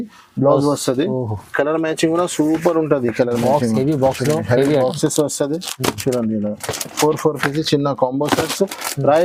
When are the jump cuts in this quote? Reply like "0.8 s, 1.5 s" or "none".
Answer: none